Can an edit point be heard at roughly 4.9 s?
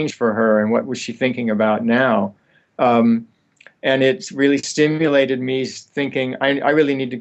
yes; 1 cut; at 4.9 s

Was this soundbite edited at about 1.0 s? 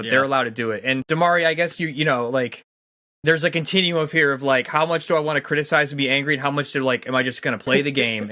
yes; 1 cut; at 1.0 s

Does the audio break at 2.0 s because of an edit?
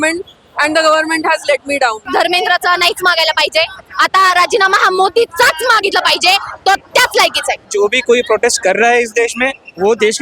yes; 2 cuts; at 2.0 s, 7.6 s

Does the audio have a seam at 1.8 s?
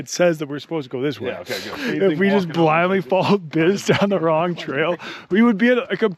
yes; 1 cut; at 1.8 s

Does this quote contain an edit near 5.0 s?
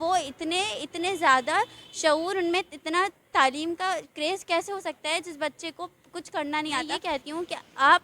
no; 1 cut; at 6.9 s

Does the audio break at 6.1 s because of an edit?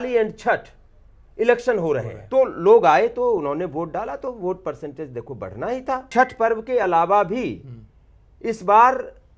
yes; 2 cuts; at 2.2 s, 6.1 s

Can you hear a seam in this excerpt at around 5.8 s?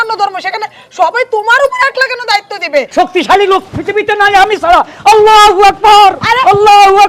no; 1 cut; at 2.9 s

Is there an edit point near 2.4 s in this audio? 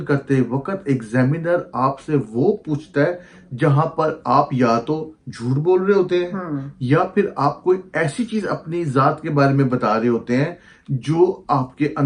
no; 0 cuts

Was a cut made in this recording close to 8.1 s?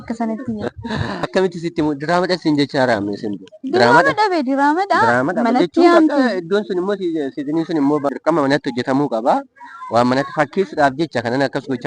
yes; 2 cuts; at 1.3 s, 8.1 s

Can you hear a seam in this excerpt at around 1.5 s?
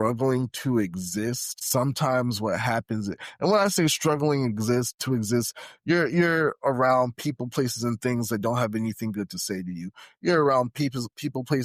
no; 0 cuts

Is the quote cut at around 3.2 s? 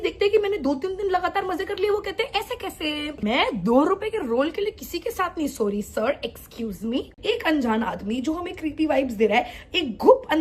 yes; 2 cuts; at 3.2 s, 7.2 s

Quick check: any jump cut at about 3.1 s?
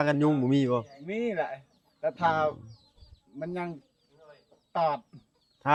no; 0 cuts

